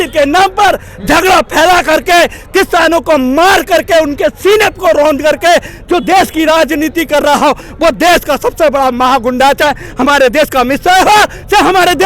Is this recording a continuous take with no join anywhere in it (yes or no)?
yes